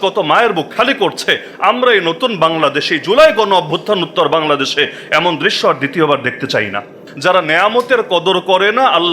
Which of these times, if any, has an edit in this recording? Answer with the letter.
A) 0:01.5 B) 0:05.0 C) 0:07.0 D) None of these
C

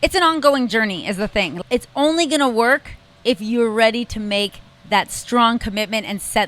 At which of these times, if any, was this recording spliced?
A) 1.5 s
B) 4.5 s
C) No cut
A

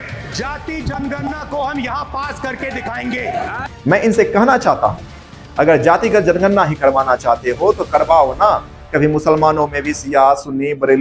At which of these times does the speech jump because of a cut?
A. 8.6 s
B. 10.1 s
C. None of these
C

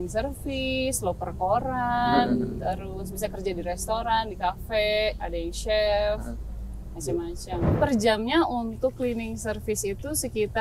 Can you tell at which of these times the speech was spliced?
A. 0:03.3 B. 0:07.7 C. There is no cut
B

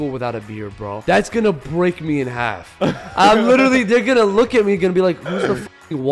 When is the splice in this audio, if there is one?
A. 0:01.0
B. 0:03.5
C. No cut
A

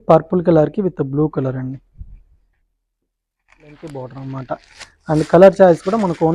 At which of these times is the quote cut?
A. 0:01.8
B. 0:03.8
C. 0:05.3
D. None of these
B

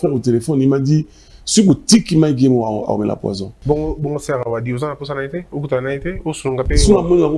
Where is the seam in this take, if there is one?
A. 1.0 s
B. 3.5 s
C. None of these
B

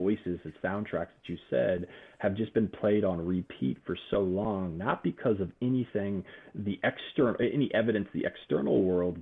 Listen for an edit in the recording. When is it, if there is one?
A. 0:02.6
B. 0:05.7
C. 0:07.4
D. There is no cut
D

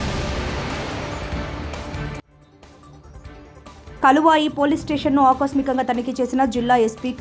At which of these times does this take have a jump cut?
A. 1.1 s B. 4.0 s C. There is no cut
B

